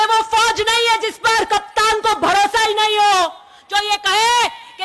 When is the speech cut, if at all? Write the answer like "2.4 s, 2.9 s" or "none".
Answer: none